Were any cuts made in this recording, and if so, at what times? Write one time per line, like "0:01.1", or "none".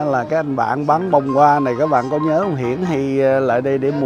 none